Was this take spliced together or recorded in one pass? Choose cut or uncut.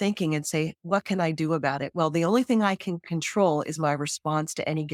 uncut